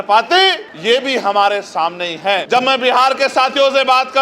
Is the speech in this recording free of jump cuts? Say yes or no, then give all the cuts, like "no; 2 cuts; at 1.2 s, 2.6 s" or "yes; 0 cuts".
no; 1 cut; at 2.4 s